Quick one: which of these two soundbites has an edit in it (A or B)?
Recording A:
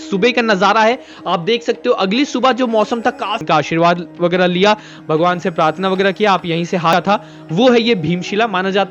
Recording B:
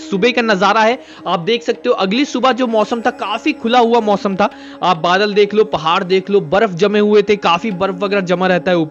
A